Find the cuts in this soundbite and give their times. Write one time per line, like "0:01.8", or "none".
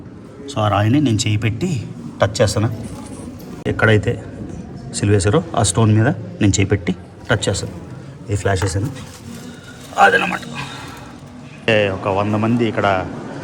0:03.6
0:11.7